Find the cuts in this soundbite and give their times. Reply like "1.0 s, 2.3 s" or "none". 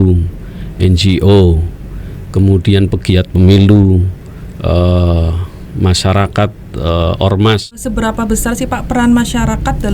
7.8 s